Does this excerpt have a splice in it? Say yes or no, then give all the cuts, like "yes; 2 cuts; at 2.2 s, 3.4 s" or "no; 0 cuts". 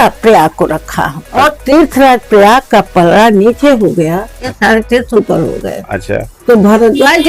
yes; 2 cuts; at 1.2 s, 4.5 s